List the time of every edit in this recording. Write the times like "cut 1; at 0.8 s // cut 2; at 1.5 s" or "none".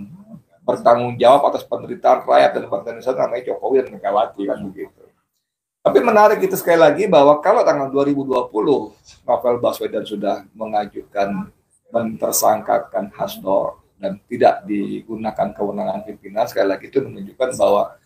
none